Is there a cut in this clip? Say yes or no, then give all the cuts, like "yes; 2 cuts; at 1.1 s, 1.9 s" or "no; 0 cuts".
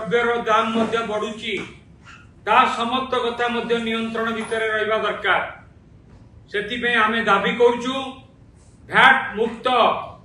no; 0 cuts